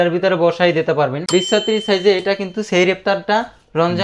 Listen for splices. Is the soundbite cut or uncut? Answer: cut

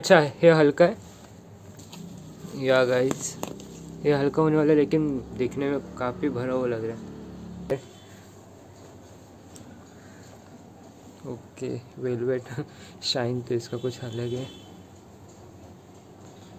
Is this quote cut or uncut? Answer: cut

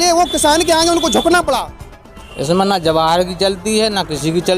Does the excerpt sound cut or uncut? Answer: cut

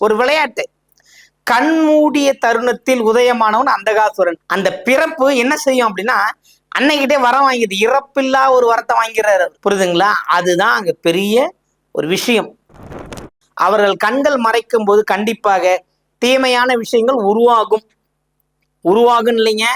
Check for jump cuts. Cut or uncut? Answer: cut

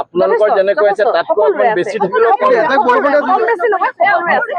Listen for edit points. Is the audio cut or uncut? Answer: uncut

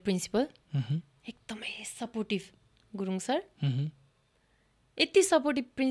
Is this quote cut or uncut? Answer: uncut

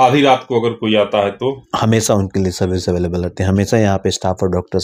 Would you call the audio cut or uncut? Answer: uncut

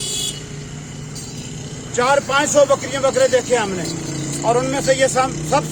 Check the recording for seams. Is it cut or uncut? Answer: uncut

